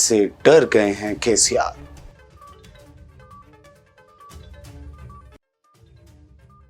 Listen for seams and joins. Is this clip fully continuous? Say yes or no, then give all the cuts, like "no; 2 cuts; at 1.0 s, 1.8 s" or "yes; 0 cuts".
yes; 0 cuts